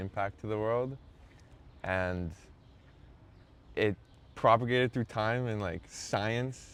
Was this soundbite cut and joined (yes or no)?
no